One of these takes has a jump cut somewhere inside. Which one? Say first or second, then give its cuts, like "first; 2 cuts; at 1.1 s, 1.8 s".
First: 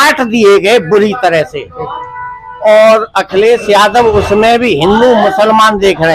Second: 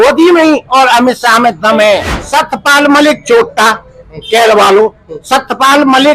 second; 1 cut; at 2.1 s